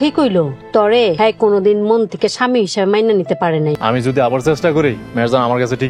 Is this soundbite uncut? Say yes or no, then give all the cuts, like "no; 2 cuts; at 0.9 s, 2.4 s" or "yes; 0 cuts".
no; 2 cuts; at 1.0 s, 3.8 s